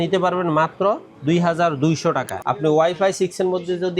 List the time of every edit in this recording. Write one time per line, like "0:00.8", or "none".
0:02.3